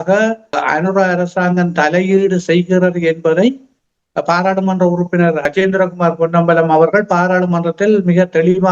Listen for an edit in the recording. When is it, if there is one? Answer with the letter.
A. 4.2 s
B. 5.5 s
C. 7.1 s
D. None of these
B